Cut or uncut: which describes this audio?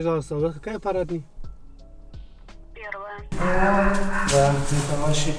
cut